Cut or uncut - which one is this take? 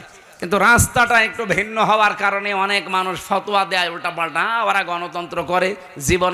uncut